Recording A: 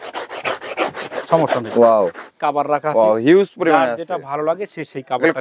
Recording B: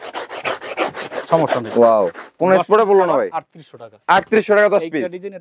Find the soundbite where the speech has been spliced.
A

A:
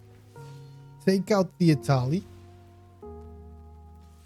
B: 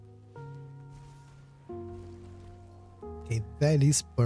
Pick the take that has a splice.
A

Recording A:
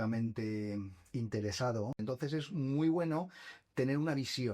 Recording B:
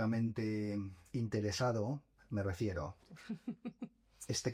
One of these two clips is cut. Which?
A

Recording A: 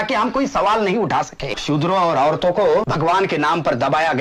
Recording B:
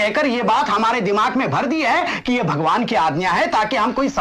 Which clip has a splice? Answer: A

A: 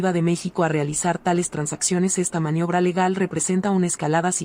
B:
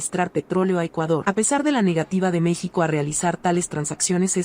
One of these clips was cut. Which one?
B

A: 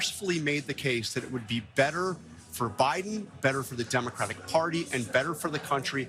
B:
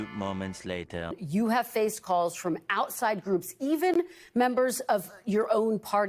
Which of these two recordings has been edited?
B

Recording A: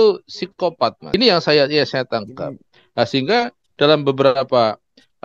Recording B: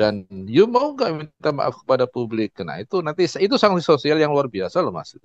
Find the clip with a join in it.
A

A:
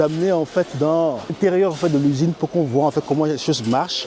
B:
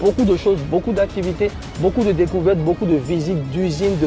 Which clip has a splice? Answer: A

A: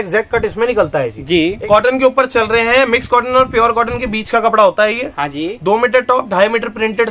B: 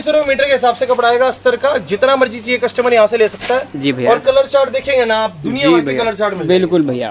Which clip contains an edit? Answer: A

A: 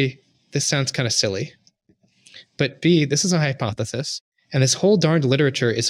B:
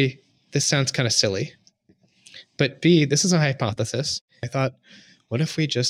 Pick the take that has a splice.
B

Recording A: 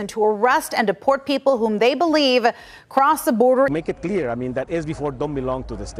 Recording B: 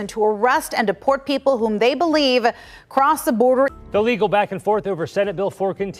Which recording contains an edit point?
B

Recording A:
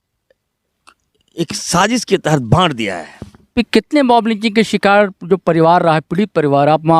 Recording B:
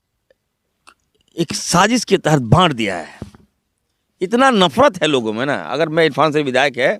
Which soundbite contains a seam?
A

